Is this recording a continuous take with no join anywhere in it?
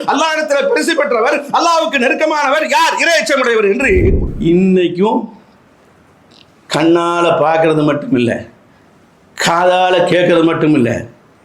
no; 1 cut; at 4.2 s

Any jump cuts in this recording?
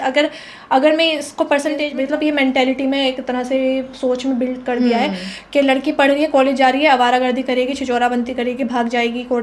yes; 1 cut; at 1.8 s

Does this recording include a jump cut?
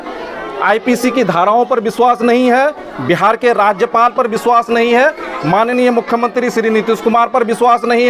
no; 0 cuts

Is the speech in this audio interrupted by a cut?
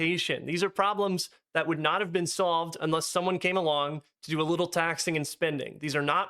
no; 0 cuts

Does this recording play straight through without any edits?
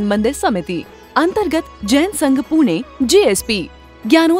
yes; 0 cuts

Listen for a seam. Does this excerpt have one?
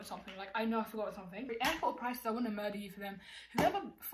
yes; 1 cut; at 1.5 s

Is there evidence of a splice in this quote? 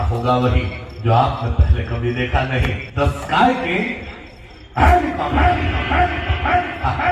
yes; 1 cut; at 2.8 s

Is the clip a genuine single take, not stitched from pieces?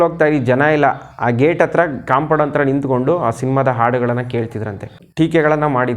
no; 1 cut; at 5.0 s

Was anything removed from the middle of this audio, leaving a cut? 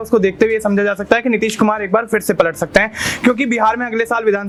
no; 0 cuts

